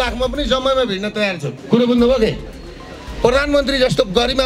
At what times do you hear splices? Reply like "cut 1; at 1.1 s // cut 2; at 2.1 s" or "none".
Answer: cut 1; at 1.5 s

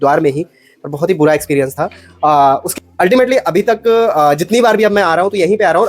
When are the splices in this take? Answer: cut 1; at 2.7 s

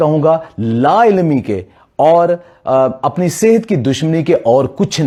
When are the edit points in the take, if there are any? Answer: none

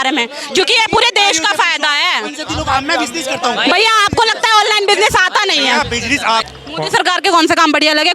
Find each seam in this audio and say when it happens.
cut 1; at 6.5 s

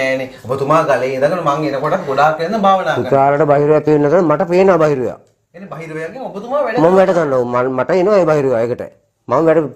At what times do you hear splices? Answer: none

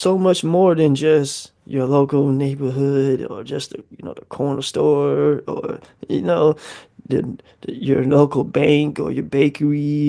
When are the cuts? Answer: none

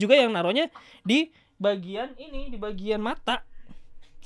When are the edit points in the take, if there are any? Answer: none

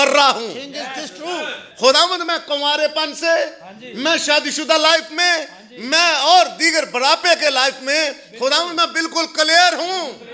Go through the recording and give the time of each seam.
cut 1; at 1.7 s

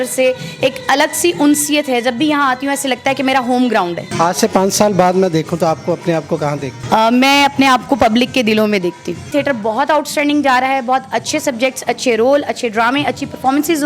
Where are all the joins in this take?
cut 1; at 4.1 s // cut 2; at 6.7 s // cut 3; at 9.3 s

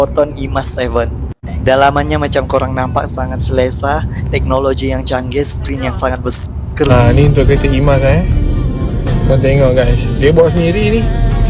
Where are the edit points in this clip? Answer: cut 1; at 6.9 s

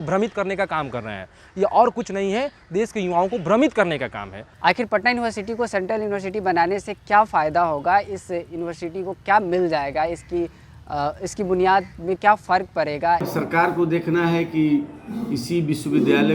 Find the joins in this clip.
cut 1; at 4.4 s // cut 2; at 13.3 s

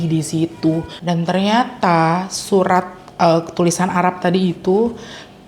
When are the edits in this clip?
cut 1; at 0.9 s

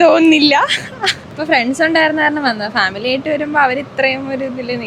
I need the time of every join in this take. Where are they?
cut 1; at 1.3 s

